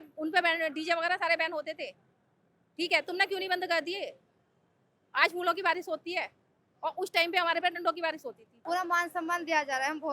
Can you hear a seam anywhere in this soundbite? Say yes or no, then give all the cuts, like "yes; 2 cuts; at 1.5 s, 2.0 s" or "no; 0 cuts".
yes; 1 cut; at 8.5 s